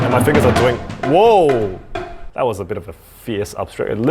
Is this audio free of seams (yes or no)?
yes